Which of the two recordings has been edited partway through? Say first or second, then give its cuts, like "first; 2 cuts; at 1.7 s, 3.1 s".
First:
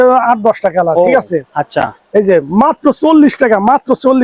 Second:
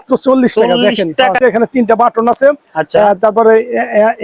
second; 1 cut; at 1.4 s